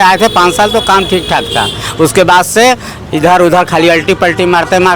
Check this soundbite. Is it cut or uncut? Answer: uncut